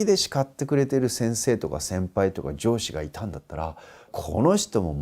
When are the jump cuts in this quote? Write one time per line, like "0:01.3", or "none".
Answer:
0:01.1
0:04.1